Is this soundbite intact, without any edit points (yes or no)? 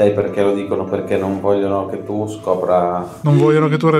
no